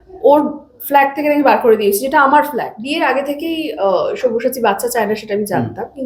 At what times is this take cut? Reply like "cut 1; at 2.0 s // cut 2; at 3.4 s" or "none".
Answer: cut 1; at 3.2 s